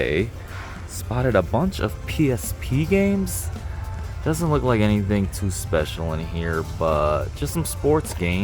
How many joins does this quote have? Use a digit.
0